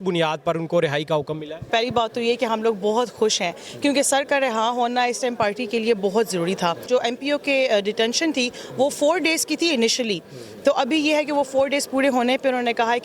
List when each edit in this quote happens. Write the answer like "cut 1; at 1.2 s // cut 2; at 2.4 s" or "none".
cut 1; at 1.7 s // cut 2; at 6.8 s